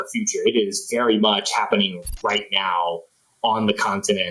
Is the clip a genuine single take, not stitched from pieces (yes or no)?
yes